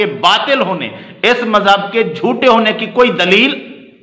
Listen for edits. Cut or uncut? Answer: uncut